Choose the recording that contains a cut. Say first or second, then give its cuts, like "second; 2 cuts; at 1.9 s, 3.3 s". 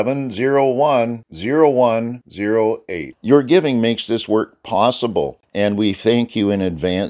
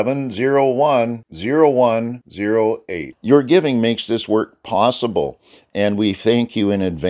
first; 1 cut; at 5.4 s